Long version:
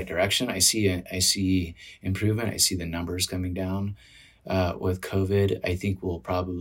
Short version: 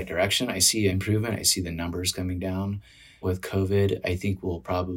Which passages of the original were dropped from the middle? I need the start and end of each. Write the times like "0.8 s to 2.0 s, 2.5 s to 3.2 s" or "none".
0.9 s to 2.1 s, 4.3 s to 4.8 s